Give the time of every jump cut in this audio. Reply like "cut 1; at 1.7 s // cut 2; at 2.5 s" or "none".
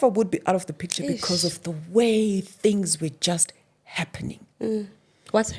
none

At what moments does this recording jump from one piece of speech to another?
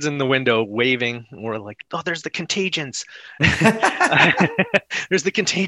none

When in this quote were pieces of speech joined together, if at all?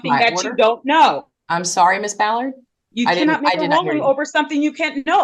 none

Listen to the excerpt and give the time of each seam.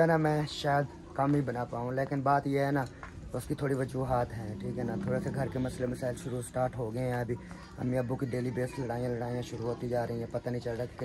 none

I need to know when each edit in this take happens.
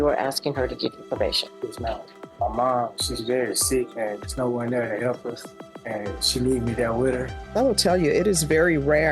cut 1; at 2.2 s // cut 2; at 7.4 s

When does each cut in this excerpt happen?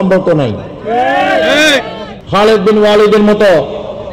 cut 1; at 2.0 s

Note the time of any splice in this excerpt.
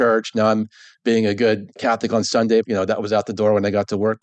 cut 1; at 2.7 s

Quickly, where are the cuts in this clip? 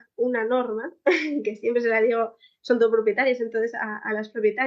none

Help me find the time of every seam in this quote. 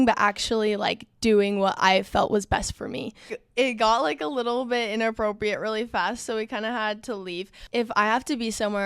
cut 1; at 3.4 s // cut 2; at 7.6 s

